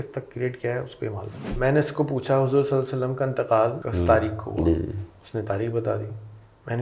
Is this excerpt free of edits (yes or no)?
no